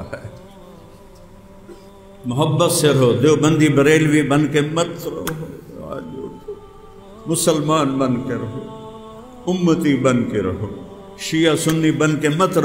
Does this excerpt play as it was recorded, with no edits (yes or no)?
no